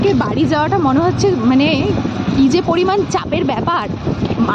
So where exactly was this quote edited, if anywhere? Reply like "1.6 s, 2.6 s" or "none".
none